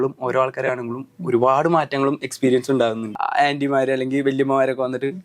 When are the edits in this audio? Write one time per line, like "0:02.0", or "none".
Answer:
0:03.2